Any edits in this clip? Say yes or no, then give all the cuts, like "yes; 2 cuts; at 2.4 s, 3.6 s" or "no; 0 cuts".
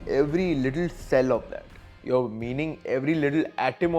no; 0 cuts